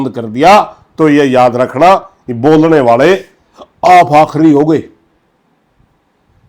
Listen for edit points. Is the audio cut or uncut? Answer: uncut